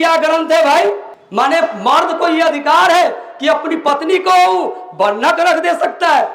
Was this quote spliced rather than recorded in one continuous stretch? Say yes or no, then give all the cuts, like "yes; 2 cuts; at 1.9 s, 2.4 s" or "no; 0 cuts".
no; 0 cuts